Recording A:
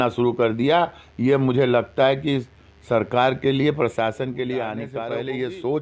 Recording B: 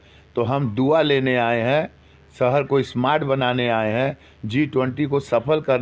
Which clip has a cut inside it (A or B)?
A